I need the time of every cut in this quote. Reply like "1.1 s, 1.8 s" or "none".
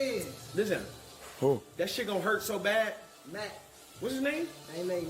2.4 s